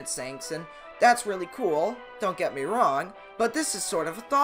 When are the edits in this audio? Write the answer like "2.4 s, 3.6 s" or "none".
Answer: 2.1 s, 3.2 s

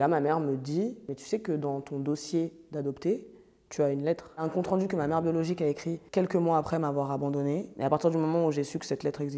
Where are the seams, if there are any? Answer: 4.5 s, 7.7 s

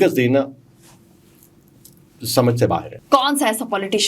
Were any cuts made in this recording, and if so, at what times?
2.9 s

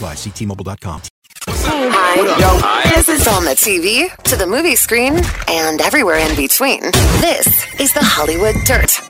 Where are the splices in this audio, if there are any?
1.6 s

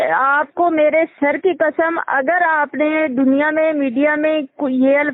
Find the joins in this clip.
none

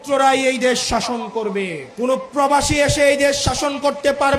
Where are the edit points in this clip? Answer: 1.8 s

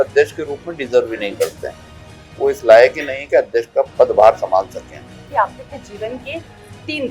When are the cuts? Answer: 5.2 s

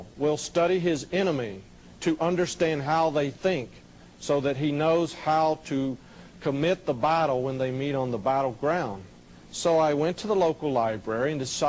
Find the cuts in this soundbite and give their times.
3.0 s

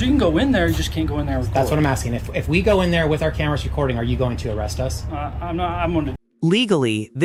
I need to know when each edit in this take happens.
none

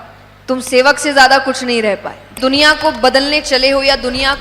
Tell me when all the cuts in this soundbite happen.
2.3 s

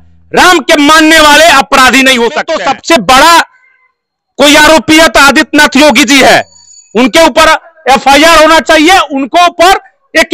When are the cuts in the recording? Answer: 2.5 s

